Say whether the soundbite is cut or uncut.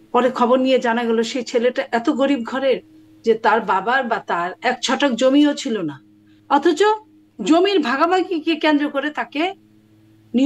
uncut